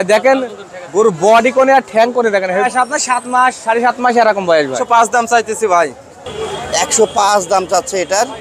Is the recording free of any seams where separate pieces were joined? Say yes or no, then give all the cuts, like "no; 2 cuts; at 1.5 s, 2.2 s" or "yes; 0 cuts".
no; 2 cuts; at 2.7 s, 4.8 s